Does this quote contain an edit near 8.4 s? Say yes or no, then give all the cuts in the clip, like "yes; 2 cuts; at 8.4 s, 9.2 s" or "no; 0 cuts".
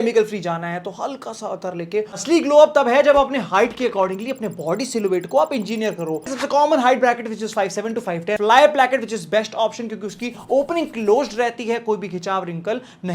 yes; 3 cuts; at 2.2 s, 6.3 s, 8.4 s